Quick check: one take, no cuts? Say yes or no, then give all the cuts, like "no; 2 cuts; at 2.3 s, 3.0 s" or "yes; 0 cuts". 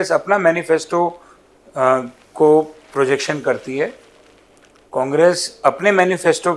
yes; 0 cuts